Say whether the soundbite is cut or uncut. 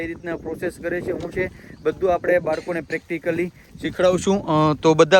uncut